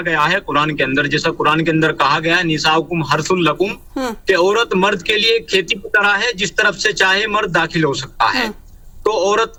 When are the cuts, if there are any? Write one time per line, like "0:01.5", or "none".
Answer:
none